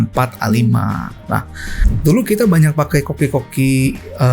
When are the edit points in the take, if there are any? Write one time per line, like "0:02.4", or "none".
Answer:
0:01.9